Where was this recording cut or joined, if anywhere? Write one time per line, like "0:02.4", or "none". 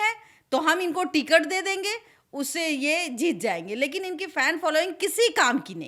none